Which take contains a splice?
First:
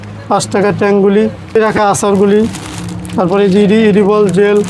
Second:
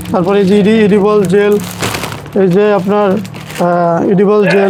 first; 1 cut; at 1.6 s

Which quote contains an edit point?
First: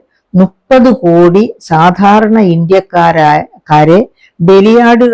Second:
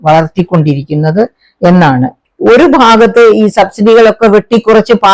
second; 1 cut; at 2.2 s

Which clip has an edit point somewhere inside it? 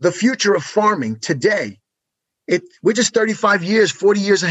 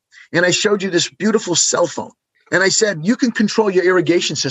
second; 1 cut; at 2.4 s

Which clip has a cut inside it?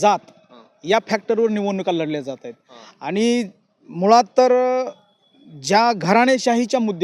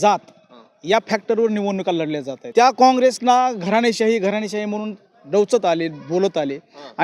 second; 1 cut; at 2.4 s

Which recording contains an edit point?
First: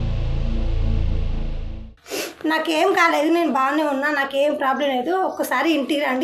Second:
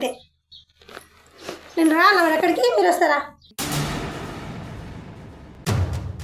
first; 1 cut; at 1.9 s

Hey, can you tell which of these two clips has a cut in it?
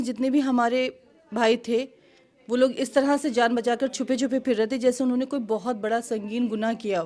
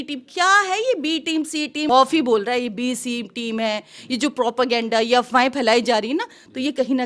second; 1 cut; at 1.9 s

